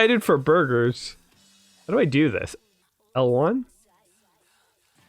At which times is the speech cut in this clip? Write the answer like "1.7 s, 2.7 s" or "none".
2.5 s